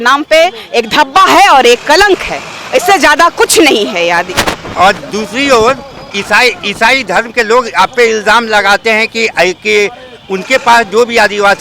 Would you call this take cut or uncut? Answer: uncut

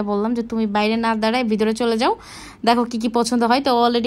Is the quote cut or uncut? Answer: uncut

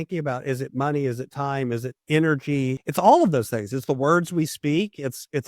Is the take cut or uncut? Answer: cut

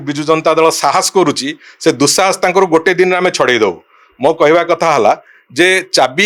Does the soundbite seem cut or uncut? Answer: uncut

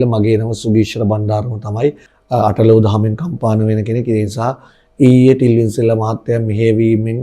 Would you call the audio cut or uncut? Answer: cut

